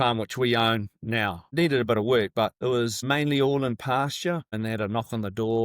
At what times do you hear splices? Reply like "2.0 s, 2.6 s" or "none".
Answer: 1.4 s, 2.8 s, 4.5 s